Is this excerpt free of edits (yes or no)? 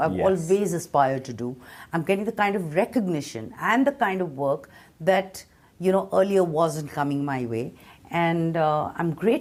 yes